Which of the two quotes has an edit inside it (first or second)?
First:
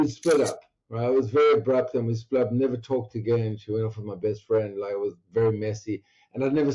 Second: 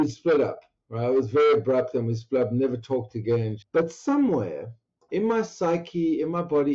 second